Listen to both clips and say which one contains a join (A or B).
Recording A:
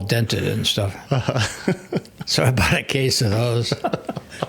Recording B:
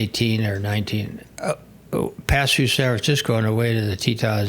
B